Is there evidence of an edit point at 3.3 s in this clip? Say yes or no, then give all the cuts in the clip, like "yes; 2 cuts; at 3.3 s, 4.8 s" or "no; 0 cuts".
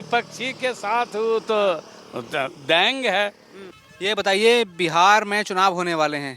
no; 0 cuts